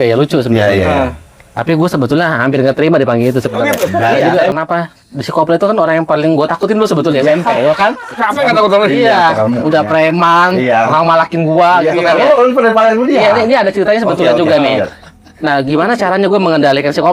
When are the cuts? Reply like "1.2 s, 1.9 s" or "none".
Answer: 4.4 s